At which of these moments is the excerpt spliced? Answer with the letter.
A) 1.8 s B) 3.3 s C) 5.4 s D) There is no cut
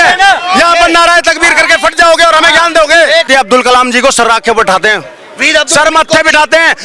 B